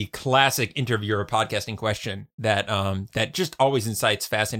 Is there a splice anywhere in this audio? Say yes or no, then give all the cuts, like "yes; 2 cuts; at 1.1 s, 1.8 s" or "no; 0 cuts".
no; 0 cuts